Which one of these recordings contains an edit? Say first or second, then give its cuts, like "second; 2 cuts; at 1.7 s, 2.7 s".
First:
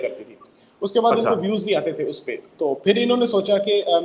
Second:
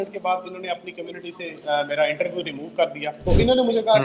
second; 1 cut; at 3.1 s